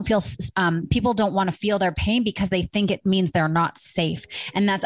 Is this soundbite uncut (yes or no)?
yes